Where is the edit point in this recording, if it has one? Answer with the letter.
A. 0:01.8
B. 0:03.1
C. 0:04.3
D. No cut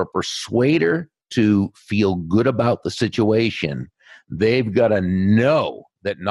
D